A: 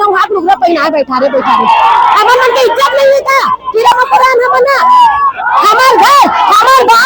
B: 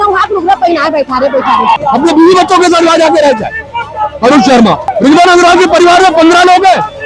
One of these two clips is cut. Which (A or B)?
B